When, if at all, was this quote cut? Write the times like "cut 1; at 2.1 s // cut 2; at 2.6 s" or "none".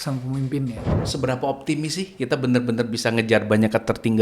cut 1; at 0.9 s